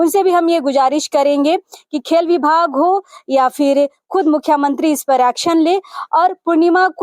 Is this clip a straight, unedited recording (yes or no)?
yes